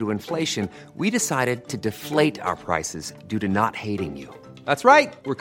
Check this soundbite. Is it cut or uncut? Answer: uncut